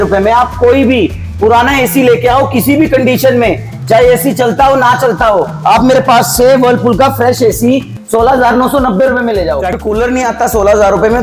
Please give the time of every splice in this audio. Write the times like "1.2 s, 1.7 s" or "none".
9.8 s